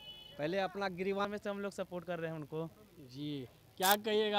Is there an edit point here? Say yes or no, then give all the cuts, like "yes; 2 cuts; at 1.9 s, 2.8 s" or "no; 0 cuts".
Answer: yes; 1 cut; at 1.2 s